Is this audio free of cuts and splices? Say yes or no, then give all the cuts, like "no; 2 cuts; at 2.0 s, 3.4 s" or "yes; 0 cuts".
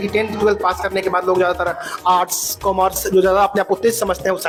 yes; 0 cuts